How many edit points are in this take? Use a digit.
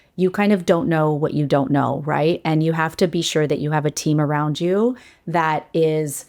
0